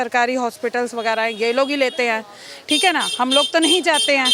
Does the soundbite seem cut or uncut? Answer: uncut